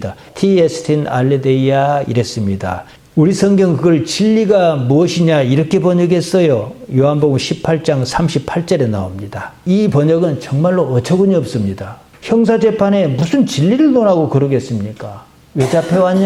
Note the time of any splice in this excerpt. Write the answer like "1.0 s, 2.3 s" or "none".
none